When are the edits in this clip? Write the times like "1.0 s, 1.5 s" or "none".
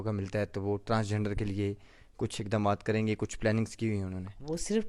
none